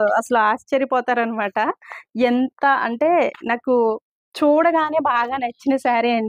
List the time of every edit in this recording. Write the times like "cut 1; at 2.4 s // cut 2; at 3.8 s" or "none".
none